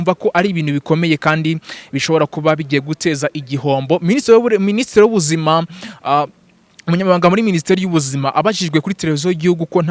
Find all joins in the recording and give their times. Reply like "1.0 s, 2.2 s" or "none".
none